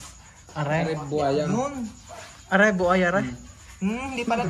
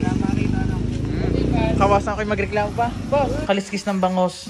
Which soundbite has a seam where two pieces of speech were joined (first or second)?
second